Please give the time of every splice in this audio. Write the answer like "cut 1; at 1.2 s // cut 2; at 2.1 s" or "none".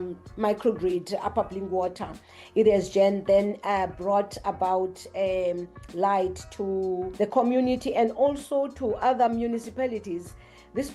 cut 1; at 7.1 s